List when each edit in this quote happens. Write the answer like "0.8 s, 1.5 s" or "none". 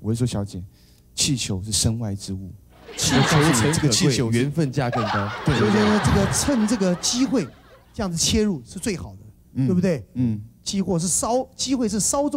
none

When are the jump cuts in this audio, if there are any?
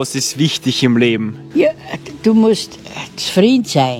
1.4 s

